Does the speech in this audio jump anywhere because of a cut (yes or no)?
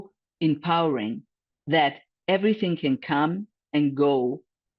yes